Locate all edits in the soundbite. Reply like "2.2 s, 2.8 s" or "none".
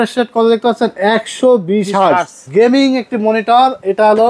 2.4 s